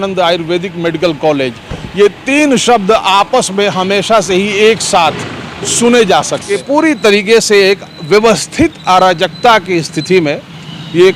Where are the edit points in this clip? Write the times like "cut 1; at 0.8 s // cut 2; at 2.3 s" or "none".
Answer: cut 1; at 6.5 s